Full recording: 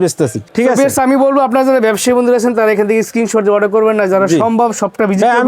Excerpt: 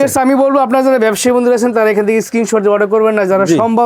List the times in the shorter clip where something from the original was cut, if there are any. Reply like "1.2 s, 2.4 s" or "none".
none